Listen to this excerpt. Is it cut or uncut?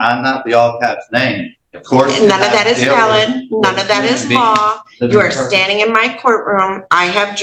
uncut